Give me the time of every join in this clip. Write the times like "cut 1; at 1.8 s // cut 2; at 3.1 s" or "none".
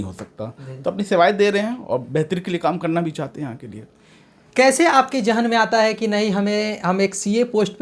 none